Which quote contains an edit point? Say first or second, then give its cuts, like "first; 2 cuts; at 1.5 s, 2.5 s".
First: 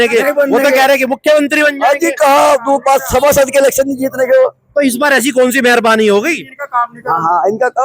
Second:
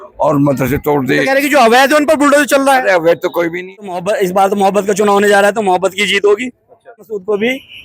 second; 2 cuts; at 4.0 s, 7.0 s